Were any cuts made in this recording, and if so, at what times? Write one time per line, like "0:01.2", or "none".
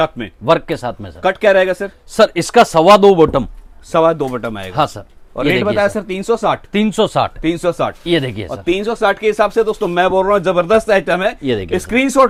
none